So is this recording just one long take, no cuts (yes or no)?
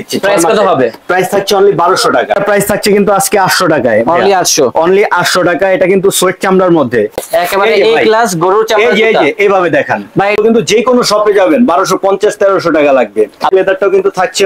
no